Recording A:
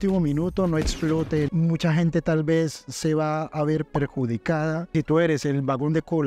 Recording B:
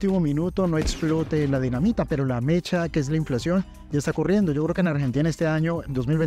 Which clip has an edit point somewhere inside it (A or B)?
A